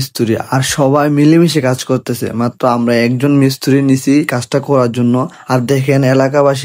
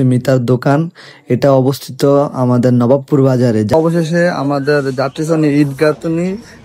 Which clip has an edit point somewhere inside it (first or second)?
second